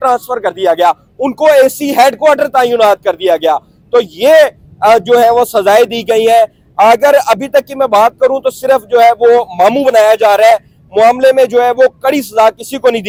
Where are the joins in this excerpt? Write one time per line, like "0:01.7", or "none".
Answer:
none

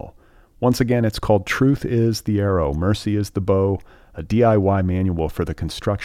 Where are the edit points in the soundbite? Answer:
none

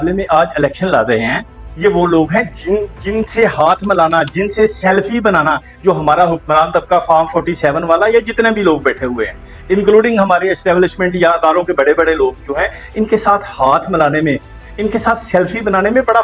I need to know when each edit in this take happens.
none

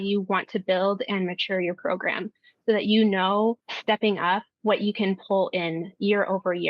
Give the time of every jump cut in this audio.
0:03.7

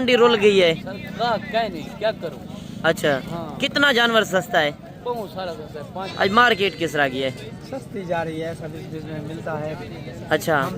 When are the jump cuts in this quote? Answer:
0:06.0

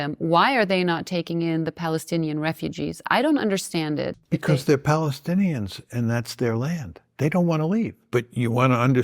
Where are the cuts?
0:04.2
0:08.0

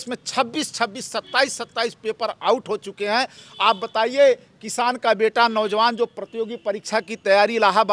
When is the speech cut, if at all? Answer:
none

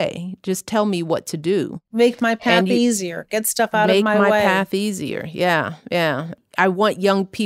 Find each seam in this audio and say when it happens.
none

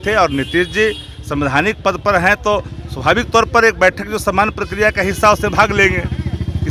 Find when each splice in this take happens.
none

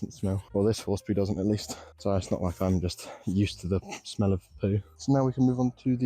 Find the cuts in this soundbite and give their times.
0:04.9

